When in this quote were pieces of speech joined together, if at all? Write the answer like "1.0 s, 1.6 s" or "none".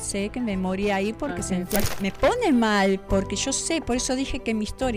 1.9 s